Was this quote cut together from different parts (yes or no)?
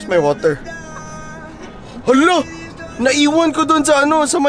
no